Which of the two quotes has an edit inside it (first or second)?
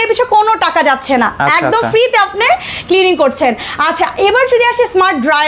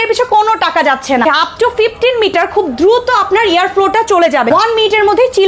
second